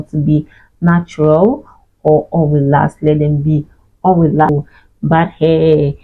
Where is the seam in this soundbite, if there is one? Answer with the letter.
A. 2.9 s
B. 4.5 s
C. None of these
B